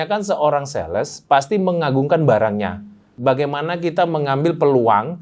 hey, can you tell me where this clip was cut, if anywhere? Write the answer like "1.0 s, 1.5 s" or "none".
3.1 s